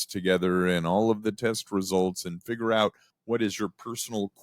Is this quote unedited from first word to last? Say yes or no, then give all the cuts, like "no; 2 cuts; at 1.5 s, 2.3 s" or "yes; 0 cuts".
no; 1 cut; at 3.1 s